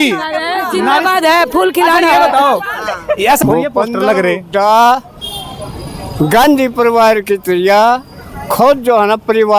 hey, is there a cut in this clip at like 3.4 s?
yes; 1 cut; at 3.4 s

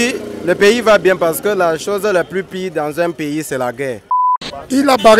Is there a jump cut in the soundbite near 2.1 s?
no; 1 cut; at 4.2 s

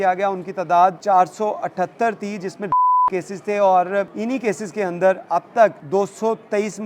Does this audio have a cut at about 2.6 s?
no; 3 cuts; at 1.0 s, 4.1 s, 5.8 s

